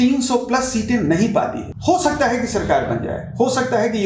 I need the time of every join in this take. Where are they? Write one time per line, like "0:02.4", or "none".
0:01.7